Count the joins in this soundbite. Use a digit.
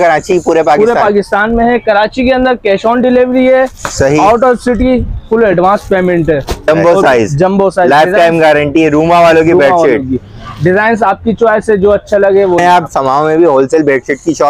2